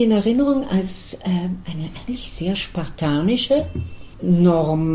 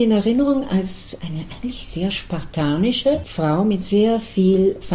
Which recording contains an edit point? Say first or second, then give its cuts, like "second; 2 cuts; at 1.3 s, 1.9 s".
second; 2 cuts; at 1.2 s, 3.3 s